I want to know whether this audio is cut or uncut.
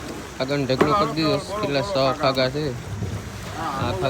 uncut